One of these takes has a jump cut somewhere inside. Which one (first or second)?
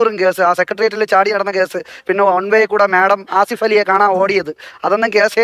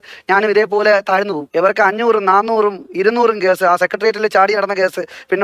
second